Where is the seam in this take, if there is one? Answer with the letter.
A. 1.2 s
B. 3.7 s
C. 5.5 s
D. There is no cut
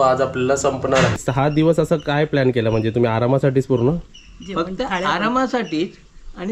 A